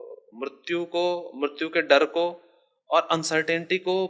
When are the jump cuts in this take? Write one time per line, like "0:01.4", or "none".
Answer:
none